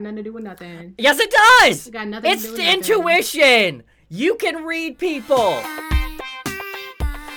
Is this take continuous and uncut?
no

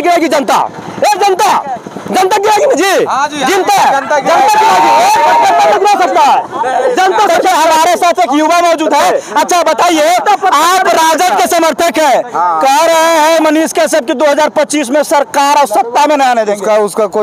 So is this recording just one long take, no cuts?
yes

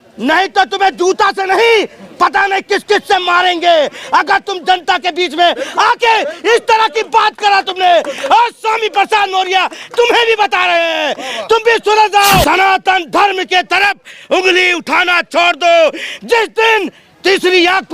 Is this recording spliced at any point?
yes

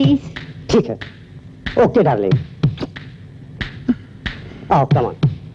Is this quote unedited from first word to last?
yes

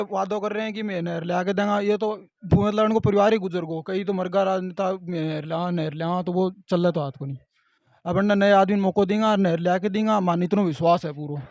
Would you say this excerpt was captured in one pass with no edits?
yes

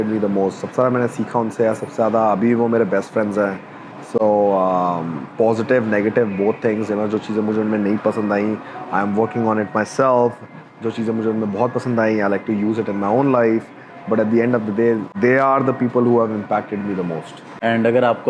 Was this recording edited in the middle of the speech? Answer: no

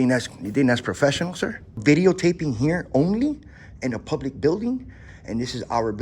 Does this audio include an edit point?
yes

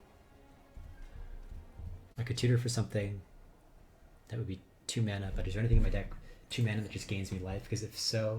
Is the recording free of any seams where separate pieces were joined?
no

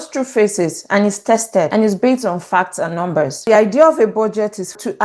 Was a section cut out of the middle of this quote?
yes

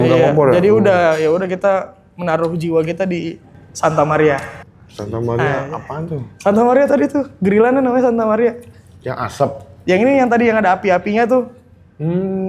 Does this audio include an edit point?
no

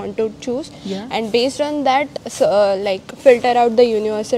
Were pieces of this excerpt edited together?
no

